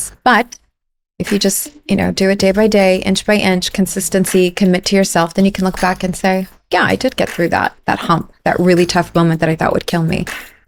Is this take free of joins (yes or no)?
yes